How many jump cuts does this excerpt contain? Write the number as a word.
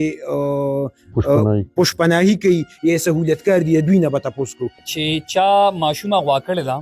one